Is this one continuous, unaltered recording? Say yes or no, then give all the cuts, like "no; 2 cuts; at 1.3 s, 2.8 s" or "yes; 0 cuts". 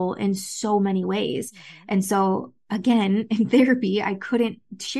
yes; 0 cuts